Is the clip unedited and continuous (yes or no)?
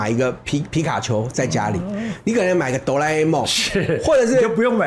yes